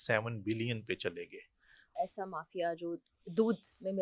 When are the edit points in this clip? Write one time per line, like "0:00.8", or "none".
0:02.0